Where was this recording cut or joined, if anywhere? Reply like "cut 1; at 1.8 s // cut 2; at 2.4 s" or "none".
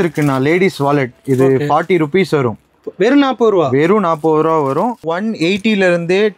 cut 1; at 5.0 s